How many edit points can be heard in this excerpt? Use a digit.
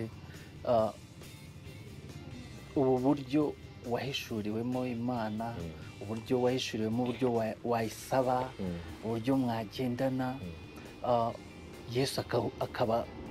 0